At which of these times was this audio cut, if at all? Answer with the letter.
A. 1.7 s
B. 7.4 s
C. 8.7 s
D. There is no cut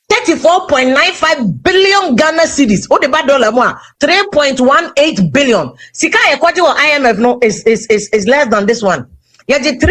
D